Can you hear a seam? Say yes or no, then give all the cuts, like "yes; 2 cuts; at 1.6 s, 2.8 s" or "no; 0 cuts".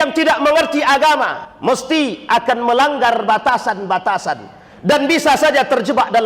yes; 1 cut; at 1.4 s